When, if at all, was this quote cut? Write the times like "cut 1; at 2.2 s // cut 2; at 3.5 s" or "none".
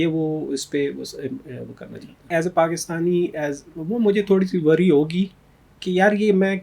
cut 1; at 2.3 s